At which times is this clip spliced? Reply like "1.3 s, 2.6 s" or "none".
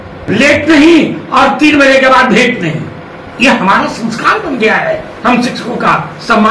none